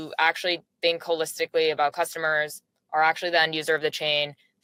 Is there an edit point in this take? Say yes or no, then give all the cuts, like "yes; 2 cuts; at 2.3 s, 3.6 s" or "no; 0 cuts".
no; 0 cuts